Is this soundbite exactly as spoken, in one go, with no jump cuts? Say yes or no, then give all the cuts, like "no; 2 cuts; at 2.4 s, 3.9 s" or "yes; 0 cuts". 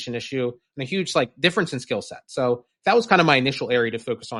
yes; 0 cuts